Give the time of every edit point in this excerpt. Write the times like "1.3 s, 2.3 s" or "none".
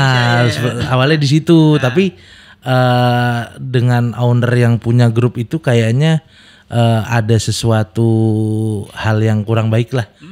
none